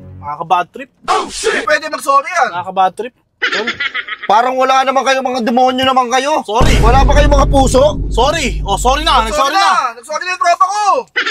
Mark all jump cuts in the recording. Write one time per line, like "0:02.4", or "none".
none